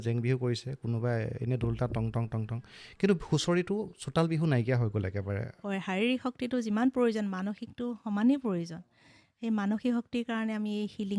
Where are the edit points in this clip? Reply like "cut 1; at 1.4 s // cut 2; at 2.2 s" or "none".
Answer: cut 1; at 5.5 s